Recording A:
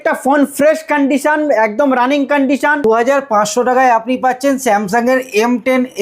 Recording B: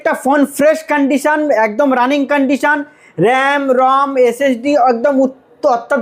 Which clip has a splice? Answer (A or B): A